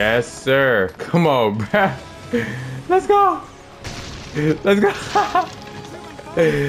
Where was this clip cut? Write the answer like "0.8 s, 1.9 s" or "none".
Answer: 1.0 s